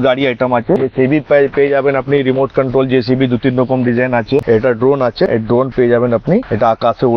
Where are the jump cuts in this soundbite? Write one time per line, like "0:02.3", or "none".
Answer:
0:00.8
0:04.4